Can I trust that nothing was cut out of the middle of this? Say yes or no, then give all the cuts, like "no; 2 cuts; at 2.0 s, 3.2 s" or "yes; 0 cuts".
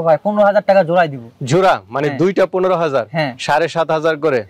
yes; 0 cuts